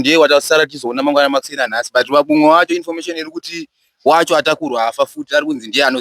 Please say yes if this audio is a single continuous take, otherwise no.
yes